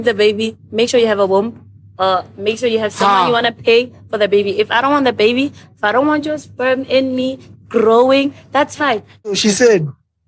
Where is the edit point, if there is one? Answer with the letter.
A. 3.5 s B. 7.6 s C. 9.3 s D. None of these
C